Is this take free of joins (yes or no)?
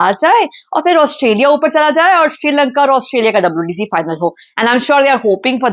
yes